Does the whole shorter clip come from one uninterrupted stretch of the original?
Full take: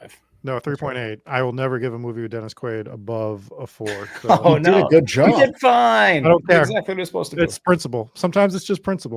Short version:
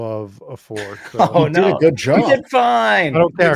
yes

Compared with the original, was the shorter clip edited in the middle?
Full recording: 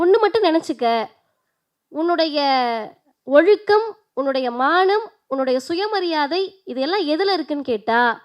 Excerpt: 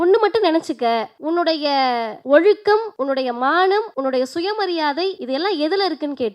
yes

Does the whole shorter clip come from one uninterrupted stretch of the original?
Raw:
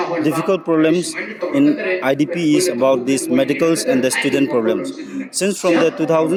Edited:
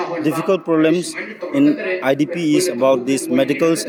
yes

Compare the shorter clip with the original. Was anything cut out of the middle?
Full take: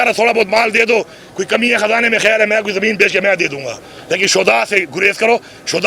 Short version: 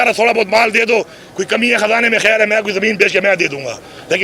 no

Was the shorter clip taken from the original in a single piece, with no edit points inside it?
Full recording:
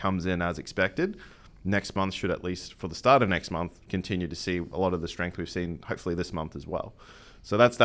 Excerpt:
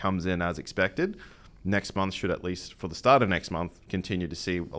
yes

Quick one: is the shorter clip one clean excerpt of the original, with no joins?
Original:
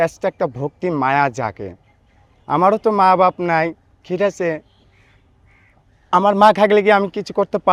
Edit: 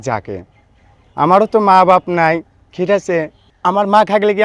no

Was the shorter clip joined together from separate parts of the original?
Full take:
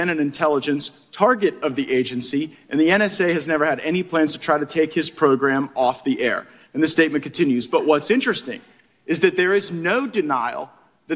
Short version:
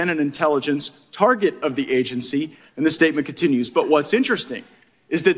yes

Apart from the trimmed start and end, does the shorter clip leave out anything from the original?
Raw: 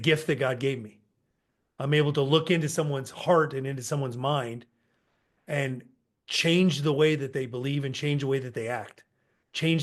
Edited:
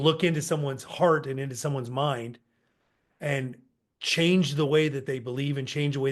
no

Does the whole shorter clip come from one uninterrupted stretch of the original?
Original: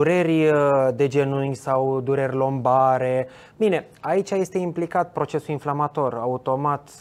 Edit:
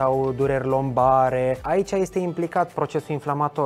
no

